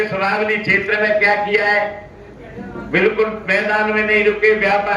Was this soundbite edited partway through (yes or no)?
no